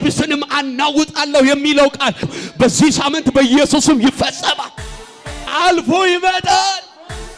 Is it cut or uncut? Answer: cut